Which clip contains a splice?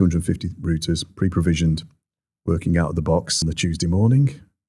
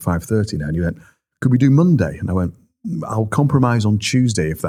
first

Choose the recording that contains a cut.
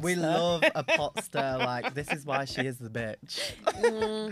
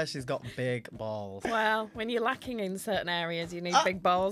second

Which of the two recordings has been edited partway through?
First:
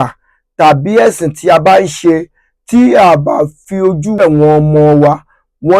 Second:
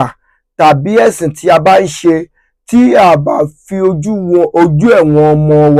first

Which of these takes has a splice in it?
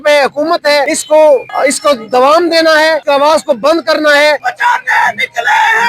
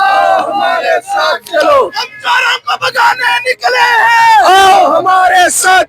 first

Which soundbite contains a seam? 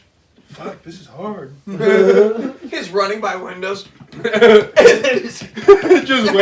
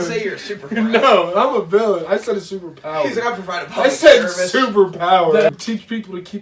second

